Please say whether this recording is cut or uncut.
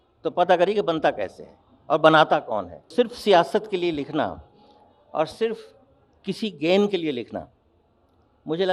cut